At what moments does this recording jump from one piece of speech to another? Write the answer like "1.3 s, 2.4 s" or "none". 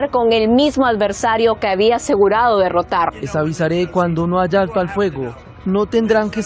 3.2 s